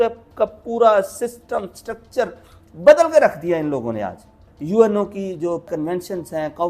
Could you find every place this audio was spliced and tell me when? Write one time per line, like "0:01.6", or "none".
0:04.5